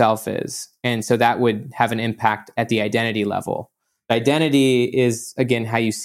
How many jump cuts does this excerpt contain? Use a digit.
1